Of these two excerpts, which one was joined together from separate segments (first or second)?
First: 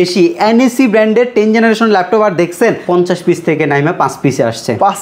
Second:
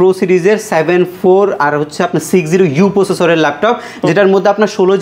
first